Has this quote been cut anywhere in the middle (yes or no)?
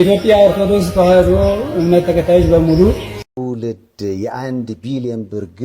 yes